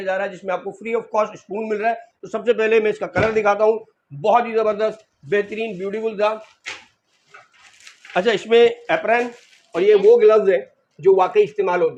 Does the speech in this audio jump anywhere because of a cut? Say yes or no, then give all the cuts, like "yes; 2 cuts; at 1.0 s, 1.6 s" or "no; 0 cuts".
no; 0 cuts